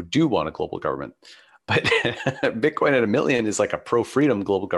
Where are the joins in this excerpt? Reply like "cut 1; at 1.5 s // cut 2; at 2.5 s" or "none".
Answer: cut 1; at 1.6 s

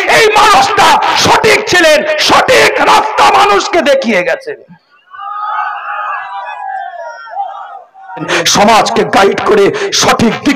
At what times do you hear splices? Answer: cut 1; at 8.3 s

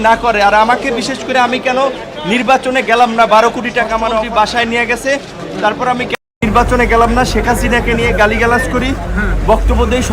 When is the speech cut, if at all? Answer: cut 1; at 4.1 s

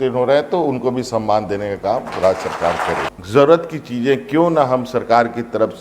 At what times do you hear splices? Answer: cut 1; at 3.1 s

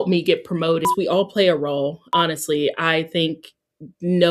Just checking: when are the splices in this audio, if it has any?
cut 1; at 0.9 s // cut 2; at 2.1 s

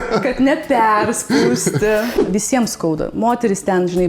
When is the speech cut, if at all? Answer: cut 1; at 2.2 s

